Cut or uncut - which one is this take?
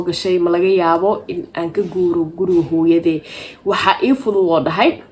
uncut